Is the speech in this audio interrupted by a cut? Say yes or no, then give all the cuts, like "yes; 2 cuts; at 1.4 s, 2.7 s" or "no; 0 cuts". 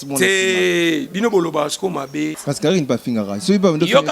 yes; 1 cut; at 2.4 s